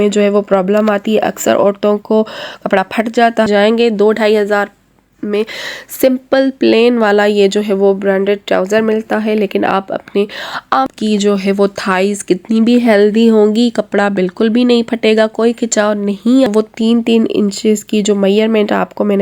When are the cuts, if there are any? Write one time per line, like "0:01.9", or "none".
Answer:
0:03.5
0:10.9
0:16.5